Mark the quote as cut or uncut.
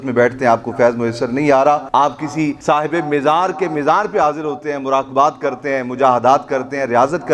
cut